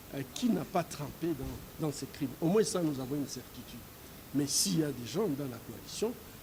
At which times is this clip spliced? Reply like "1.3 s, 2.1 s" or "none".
none

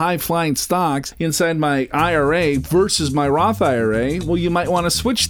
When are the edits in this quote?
1.1 s

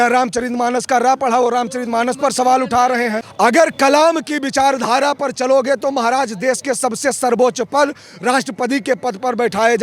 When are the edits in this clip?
3.2 s

